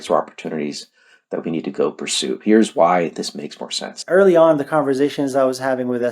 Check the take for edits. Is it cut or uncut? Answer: cut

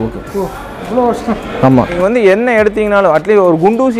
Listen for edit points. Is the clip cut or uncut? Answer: cut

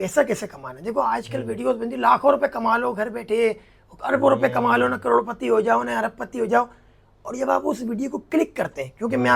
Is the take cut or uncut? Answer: uncut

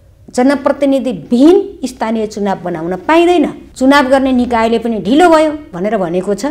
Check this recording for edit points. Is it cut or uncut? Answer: cut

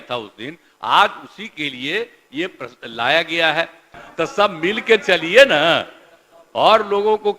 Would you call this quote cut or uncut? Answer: cut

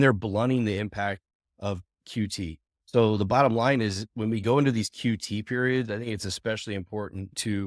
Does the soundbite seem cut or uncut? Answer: uncut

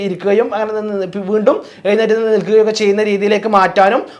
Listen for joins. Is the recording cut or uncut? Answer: uncut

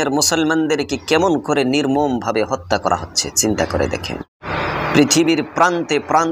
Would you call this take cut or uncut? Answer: cut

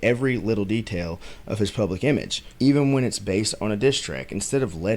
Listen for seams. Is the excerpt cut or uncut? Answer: cut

